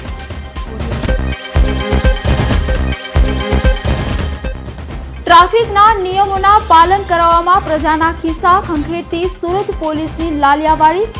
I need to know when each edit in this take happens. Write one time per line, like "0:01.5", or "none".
0:05.0